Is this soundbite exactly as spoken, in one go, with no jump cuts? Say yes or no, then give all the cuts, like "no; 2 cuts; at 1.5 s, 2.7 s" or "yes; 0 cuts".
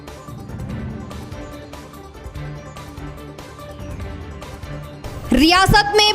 no; 1 cut; at 4.1 s